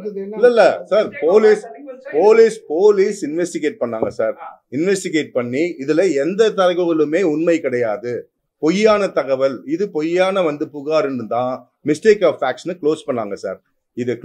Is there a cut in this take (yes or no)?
no